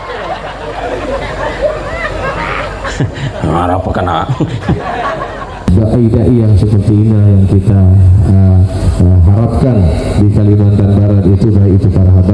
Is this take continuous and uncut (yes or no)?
no